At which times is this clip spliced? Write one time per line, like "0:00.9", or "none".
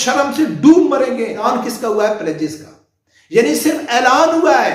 0:01.4